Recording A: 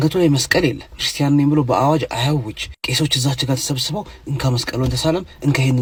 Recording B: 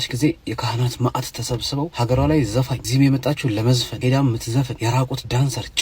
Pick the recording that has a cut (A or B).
B